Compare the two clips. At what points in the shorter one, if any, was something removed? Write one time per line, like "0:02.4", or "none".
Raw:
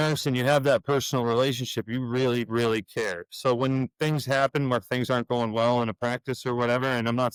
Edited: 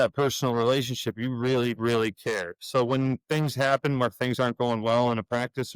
none